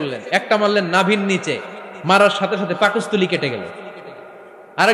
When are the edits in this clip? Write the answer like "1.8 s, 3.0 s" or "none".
none